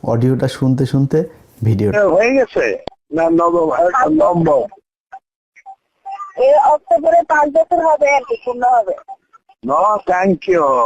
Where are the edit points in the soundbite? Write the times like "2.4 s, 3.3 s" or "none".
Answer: 1.9 s